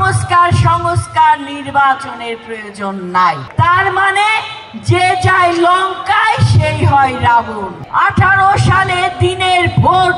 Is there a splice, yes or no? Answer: yes